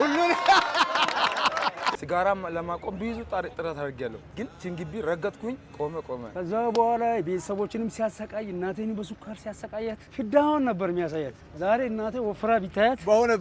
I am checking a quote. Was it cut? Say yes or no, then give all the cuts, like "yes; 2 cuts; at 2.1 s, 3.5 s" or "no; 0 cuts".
yes; 5 cuts; at 2.0 s, 4.5 s, 6.0 s, 10.0 s, 11.4 s